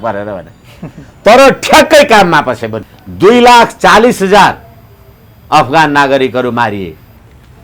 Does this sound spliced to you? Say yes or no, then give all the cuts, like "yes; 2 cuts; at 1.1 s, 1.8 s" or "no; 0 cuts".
yes; 1 cut; at 2.8 s